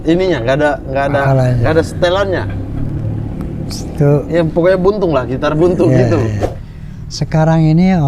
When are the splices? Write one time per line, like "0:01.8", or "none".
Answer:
0:06.4